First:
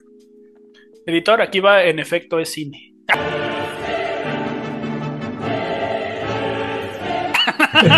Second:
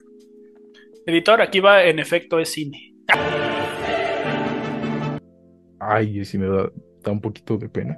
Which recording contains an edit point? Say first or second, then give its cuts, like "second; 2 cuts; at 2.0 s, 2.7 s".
second; 1 cut; at 5.2 s